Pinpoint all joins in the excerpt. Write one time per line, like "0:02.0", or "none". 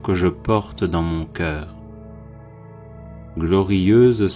0:01.7
0:03.3